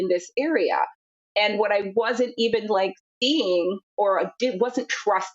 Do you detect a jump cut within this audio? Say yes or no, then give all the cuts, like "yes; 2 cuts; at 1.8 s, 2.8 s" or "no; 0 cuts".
yes; 1 cut; at 3.8 s